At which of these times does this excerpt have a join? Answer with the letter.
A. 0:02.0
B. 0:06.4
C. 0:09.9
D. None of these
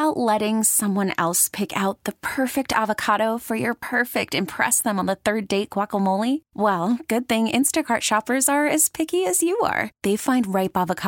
D